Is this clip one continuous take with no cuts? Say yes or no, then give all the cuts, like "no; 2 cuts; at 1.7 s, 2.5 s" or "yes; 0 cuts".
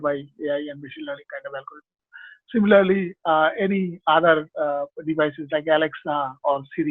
yes; 0 cuts